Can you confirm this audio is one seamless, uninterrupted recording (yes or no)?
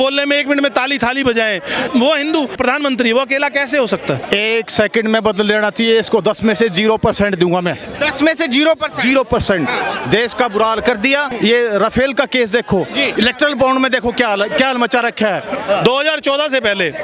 no